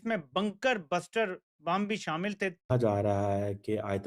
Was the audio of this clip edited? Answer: yes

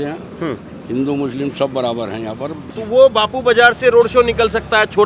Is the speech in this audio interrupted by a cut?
yes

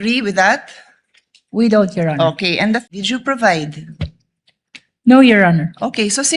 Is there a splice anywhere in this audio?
yes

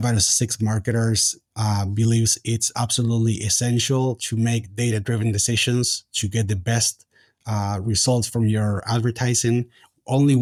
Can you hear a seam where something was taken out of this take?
no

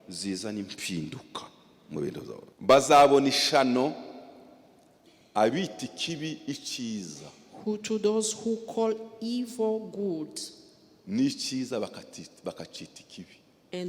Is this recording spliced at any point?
yes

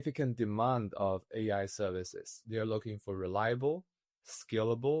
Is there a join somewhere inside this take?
no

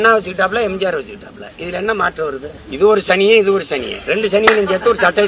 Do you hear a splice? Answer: yes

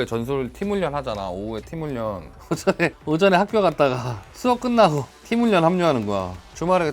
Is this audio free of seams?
no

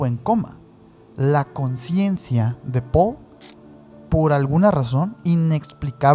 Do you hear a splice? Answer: no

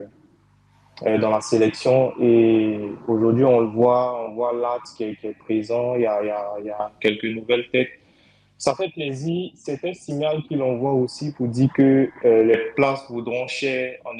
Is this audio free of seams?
yes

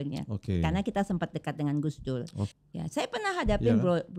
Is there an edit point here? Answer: yes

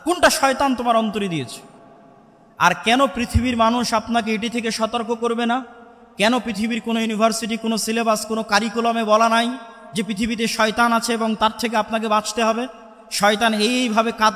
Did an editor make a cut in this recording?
no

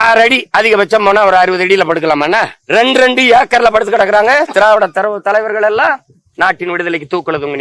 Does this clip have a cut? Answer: no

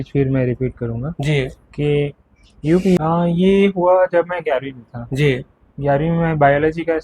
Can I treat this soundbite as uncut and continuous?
no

